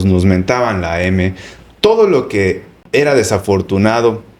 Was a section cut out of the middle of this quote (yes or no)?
no